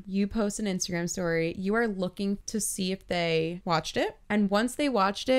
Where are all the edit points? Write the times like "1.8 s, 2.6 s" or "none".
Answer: 2.4 s, 3.6 s